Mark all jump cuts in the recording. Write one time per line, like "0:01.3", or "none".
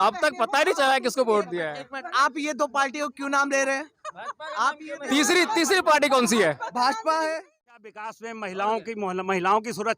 0:07.8